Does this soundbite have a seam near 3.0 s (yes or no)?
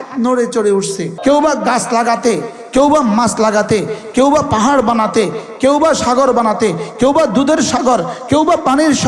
no